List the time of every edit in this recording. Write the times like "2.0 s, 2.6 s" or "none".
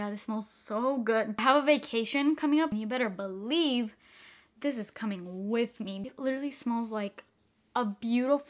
2.7 s, 6.0 s